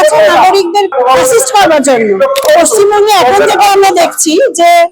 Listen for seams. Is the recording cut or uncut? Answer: cut